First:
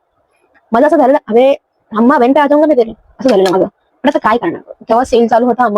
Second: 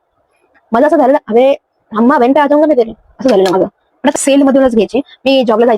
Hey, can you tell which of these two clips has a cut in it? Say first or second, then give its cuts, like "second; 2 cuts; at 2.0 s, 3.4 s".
second; 1 cut; at 4.2 s